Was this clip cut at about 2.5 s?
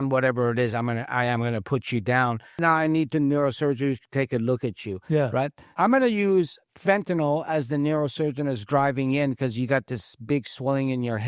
yes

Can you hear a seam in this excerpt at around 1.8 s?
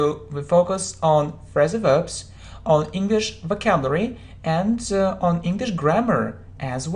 no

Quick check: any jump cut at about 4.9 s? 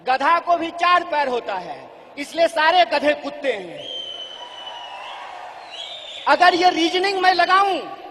yes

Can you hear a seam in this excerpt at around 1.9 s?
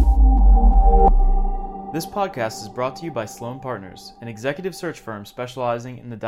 yes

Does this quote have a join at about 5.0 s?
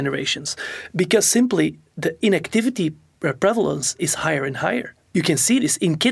yes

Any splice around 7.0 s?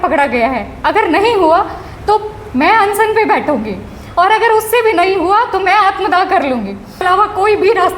yes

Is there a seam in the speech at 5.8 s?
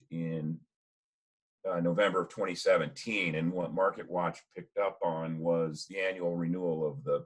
yes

